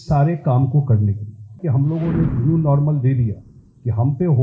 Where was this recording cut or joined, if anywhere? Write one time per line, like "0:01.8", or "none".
0:01.6